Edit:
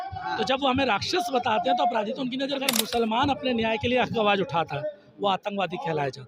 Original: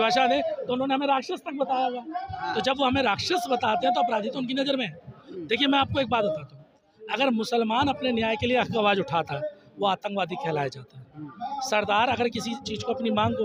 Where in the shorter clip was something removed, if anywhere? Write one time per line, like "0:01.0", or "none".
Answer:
0:02.7